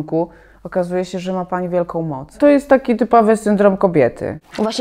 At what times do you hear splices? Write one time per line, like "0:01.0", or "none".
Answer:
0:02.4